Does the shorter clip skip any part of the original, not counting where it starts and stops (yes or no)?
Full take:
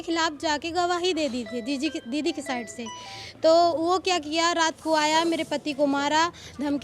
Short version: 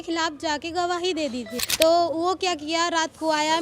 yes